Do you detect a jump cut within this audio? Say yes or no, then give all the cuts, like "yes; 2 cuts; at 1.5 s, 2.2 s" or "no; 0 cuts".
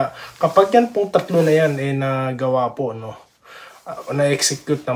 no; 0 cuts